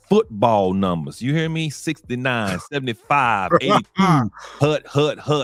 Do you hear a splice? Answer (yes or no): no